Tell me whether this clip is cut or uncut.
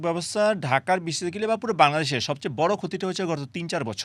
uncut